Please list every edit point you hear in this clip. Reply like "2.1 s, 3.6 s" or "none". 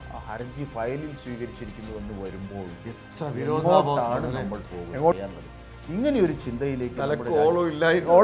5.1 s